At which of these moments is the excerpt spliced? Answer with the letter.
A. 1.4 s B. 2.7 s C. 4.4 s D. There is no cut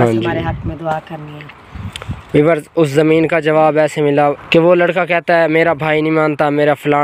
C